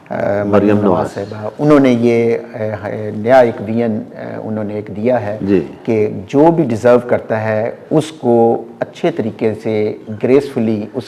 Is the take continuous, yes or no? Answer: yes